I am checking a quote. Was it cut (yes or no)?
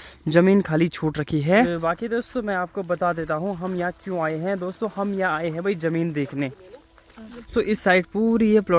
no